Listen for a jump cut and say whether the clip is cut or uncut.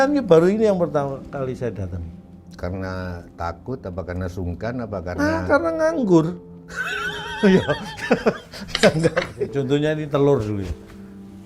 cut